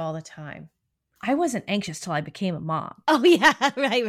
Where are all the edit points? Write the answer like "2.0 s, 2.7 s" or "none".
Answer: 2.9 s